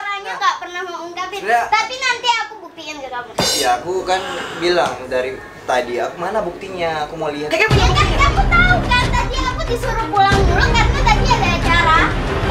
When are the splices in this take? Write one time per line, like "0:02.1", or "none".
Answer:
none